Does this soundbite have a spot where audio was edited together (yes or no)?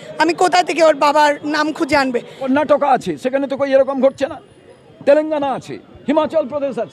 yes